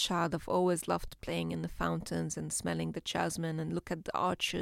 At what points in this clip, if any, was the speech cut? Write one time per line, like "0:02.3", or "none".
none